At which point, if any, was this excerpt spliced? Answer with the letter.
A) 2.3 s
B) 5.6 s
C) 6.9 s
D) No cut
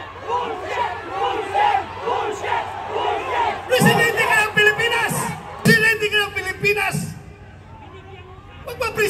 B